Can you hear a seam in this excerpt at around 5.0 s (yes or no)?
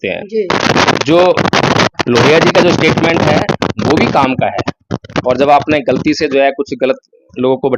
yes